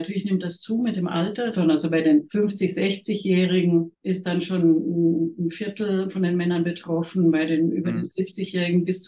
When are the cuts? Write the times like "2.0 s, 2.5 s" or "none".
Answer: 1.5 s, 2.3 s, 3.9 s, 6.1 s, 8.1 s